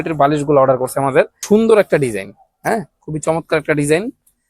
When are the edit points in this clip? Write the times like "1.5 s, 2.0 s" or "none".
1.4 s